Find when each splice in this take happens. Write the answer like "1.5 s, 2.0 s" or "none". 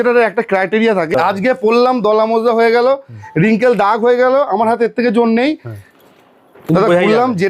1.1 s